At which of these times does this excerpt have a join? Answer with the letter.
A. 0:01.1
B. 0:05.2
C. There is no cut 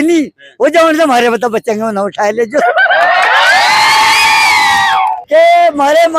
B